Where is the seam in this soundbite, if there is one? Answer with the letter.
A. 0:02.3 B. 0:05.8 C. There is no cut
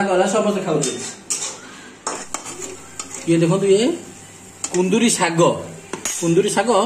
A